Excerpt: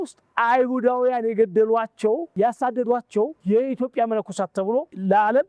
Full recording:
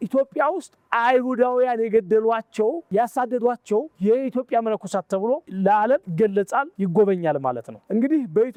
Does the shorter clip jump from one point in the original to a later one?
no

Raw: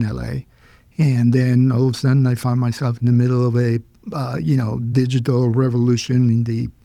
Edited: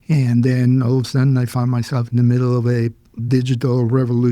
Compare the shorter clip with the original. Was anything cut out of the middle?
yes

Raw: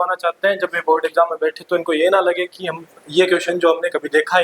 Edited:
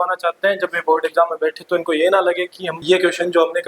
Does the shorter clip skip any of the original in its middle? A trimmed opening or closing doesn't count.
yes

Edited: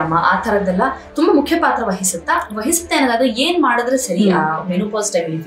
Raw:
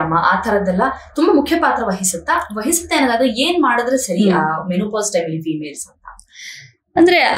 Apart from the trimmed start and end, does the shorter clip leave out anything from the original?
no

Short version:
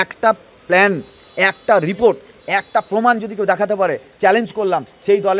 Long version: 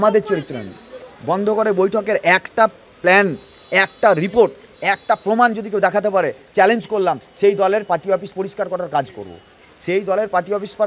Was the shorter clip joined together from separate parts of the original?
no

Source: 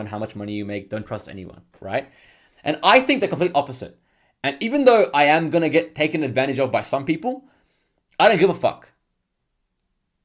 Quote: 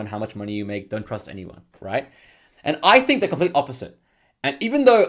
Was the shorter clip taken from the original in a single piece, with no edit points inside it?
yes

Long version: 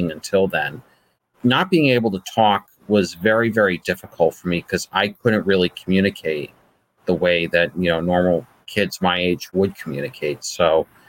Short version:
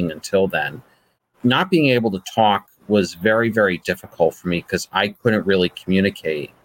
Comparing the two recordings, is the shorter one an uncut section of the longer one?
yes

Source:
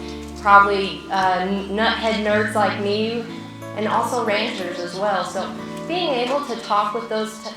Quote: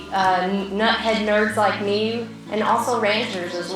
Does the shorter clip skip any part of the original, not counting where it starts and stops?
yes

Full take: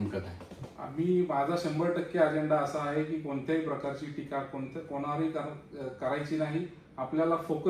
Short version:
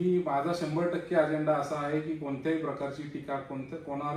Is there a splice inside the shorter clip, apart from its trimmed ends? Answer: no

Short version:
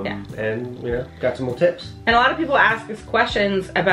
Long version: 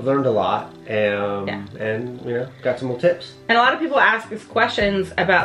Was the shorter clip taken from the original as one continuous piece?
yes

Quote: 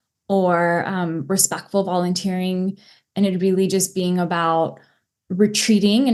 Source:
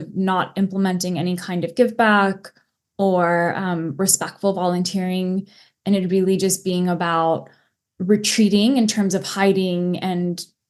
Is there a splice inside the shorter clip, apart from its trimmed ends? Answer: no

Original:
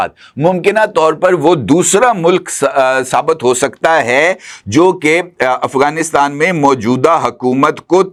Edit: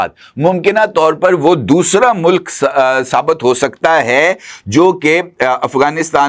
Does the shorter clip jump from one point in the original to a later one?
no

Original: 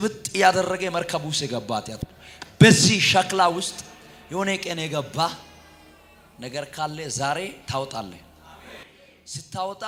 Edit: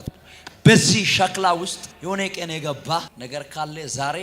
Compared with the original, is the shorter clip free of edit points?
no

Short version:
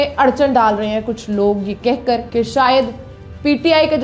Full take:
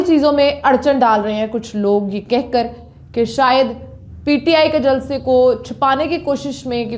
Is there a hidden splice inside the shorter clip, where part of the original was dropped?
yes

